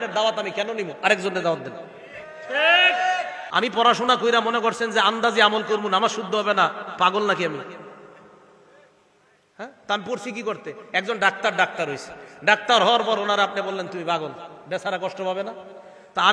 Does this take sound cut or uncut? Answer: cut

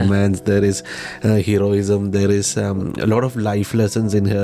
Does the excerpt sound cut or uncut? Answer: uncut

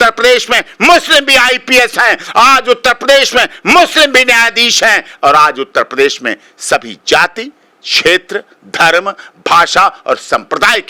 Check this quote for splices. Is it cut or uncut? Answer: uncut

